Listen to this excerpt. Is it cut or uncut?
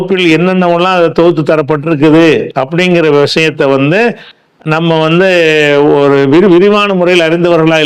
uncut